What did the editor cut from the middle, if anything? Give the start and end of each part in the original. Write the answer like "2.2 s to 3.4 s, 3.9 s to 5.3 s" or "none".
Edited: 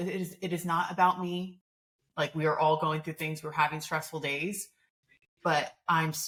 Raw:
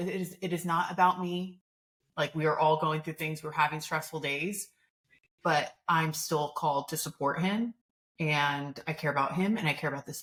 none